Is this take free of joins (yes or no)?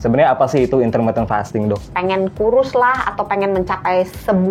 no